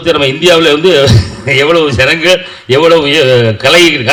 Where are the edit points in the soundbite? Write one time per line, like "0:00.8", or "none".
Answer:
none